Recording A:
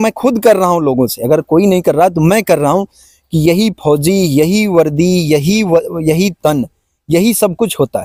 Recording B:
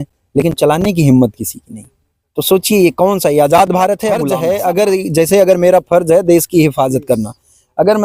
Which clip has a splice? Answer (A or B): B